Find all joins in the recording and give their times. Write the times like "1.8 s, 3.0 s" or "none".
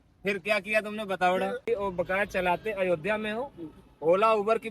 1.6 s